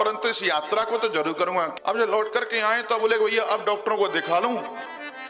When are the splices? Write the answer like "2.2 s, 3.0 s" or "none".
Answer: 1.7 s

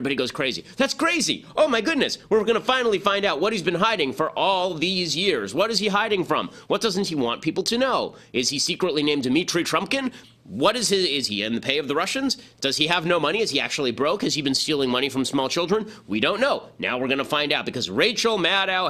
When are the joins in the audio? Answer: none

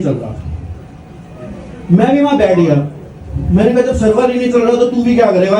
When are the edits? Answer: none

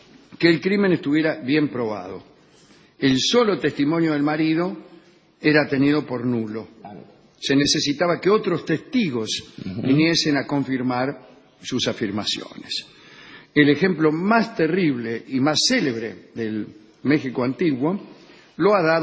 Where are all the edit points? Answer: none

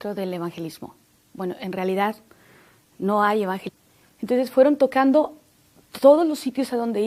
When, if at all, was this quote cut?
none

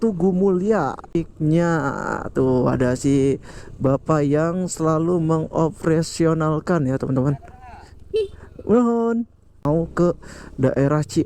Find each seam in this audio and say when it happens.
1.2 s, 9.6 s

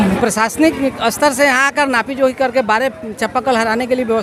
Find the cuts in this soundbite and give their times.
none

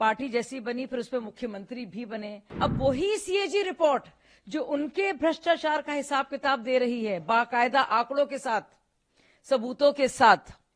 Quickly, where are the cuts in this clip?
2.4 s

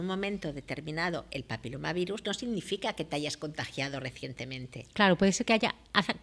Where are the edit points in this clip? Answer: none

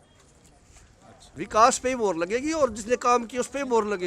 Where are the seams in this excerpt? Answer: 1.2 s

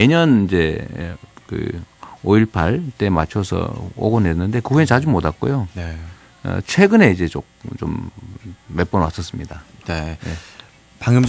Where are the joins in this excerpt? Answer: 4.2 s

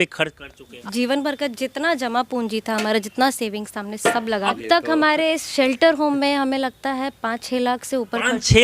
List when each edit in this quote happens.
0.8 s, 4.5 s

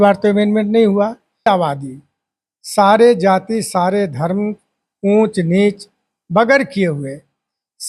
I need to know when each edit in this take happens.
1.5 s

